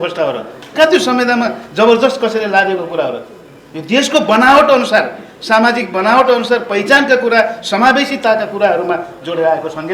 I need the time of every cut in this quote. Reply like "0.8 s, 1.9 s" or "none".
none